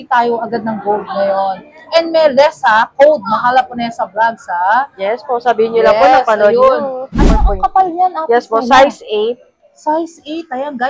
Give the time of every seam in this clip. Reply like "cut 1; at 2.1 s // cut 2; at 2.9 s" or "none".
cut 1; at 7.4 s